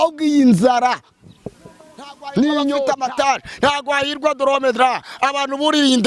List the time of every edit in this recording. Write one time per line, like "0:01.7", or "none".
0:02.9